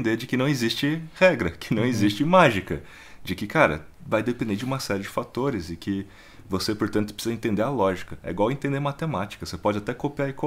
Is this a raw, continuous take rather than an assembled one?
yes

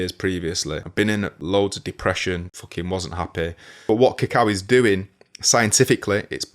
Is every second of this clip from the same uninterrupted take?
no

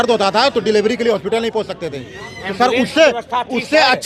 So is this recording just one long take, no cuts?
yes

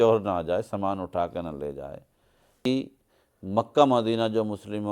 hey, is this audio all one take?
no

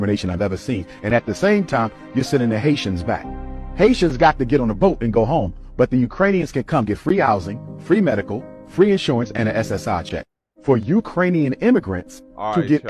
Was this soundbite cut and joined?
yes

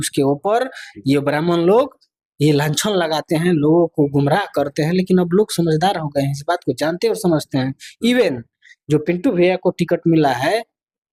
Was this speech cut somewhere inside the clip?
no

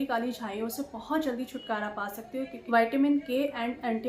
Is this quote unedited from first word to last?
no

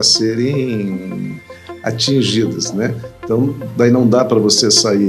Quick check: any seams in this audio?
no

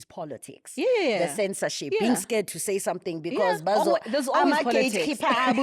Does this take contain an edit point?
no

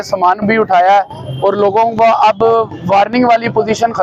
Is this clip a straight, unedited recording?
yes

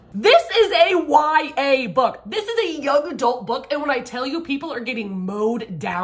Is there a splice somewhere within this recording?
no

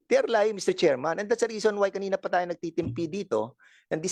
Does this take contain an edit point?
no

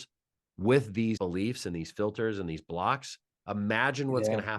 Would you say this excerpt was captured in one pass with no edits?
no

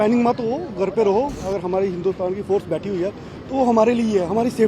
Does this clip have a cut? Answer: yes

